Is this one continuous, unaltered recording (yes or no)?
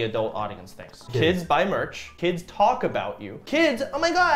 no